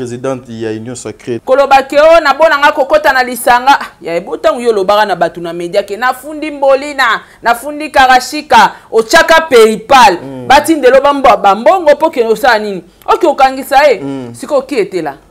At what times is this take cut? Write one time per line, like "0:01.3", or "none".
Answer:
0:01.3

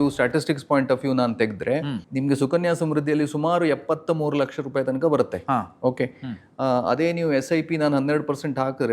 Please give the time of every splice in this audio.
0:02.0

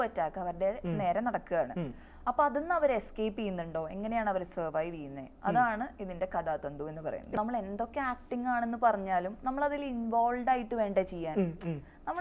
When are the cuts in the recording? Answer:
0:07.3

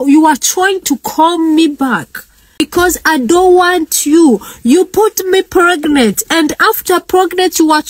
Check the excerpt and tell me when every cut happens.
0:02.6

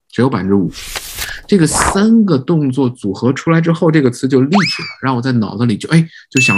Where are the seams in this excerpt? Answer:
0:01.2

